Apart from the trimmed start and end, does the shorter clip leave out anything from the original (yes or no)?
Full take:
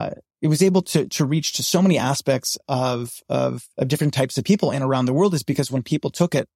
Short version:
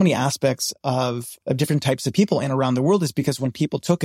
yes